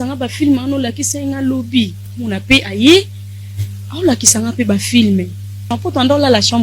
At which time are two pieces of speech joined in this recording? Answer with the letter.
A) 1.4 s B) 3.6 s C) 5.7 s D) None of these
C